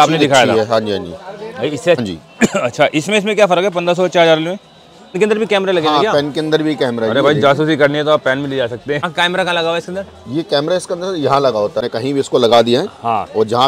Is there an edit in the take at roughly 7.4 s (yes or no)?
no